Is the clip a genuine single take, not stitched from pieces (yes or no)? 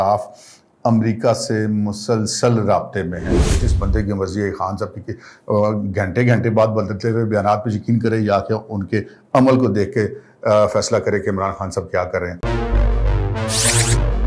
no